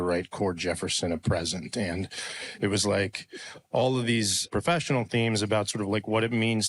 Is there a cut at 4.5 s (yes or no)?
yes